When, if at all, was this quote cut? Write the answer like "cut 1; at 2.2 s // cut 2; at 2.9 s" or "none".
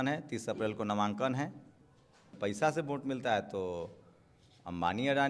none